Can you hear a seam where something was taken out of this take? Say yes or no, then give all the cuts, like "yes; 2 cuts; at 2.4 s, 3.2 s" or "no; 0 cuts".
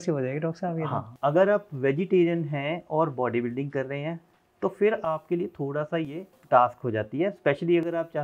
yes; 2 cuts; at 1.1 s, 6.4 s